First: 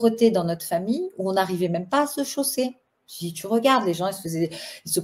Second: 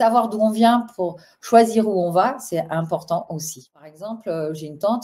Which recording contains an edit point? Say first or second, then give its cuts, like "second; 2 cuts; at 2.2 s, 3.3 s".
second; 1 cut; at 4.0 s